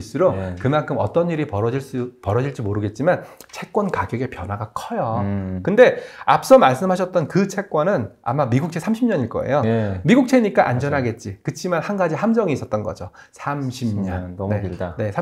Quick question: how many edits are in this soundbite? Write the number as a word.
zero